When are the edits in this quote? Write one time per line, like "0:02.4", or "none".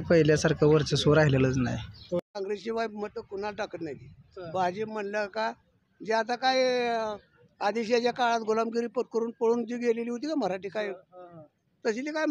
0:02.2